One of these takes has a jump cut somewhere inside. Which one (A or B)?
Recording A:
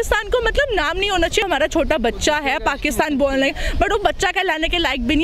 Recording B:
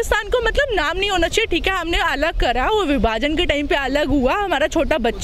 A